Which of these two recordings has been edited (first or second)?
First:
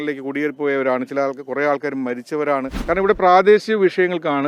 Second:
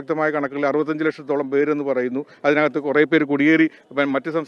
first